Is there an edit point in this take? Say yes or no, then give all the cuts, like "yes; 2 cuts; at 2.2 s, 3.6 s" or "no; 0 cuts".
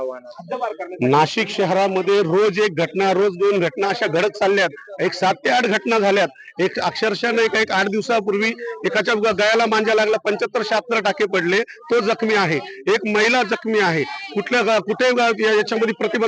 no; 0 cuts